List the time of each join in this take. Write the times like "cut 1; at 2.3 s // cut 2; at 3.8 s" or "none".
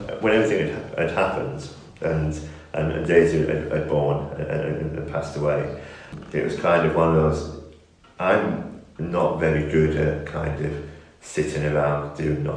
cut 1; at 6.1 s